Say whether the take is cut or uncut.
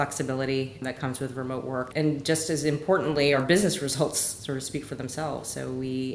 cut